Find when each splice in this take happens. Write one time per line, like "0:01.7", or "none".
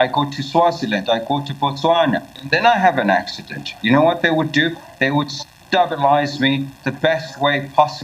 0:02.3